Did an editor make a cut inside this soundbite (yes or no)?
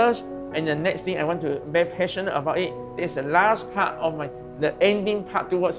no